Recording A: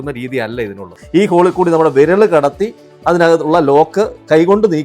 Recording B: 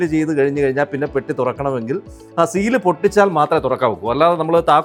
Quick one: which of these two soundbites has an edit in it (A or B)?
A